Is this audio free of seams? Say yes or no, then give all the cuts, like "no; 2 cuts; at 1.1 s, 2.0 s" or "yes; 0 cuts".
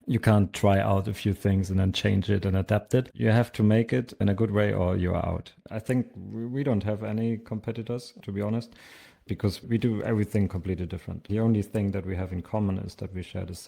no; 2 cuts; at 5.5 s, 9.6 s